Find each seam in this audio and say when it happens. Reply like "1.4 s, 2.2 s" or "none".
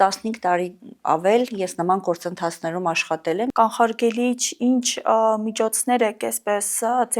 3.5 s

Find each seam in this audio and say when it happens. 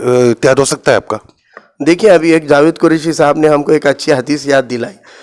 none

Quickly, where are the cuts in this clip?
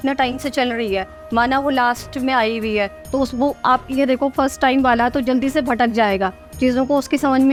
none

